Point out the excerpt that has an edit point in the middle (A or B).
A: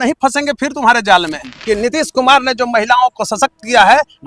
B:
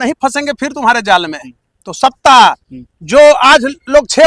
A